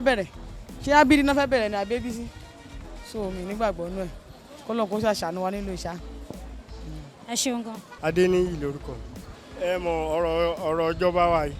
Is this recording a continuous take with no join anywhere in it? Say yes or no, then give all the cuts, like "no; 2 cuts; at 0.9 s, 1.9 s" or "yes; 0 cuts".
yes; 0 cuts